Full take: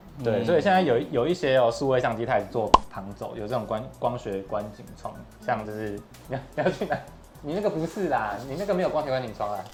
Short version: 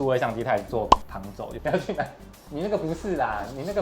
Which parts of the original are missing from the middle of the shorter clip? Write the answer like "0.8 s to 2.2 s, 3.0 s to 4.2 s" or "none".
3.4 s to 6.5 s